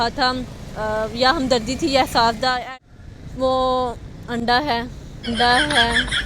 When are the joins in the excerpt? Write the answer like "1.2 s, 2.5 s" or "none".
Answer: 2.6 s